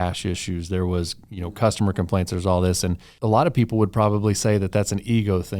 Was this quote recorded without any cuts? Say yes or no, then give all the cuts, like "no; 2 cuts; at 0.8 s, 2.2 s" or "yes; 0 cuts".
no; 1 cut; at 3.1 s